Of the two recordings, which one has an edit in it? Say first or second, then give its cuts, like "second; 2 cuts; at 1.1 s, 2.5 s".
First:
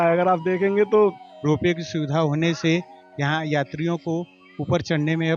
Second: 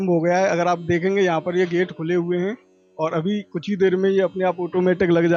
first; 1 cut; at 1.3 s